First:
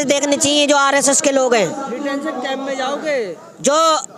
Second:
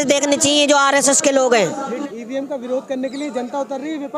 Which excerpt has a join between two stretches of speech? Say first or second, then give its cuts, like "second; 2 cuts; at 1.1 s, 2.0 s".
second; 1 cut; at 2.0 s